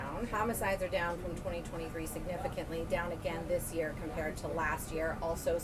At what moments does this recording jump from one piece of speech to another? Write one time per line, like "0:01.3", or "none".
none